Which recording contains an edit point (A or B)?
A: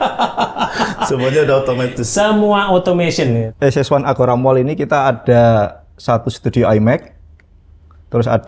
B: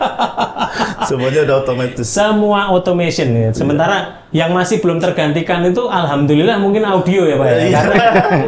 A